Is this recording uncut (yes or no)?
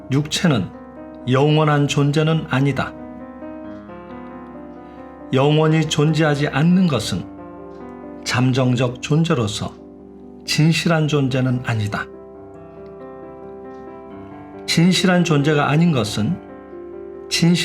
no